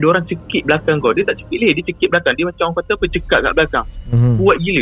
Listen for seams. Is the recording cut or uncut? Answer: uncut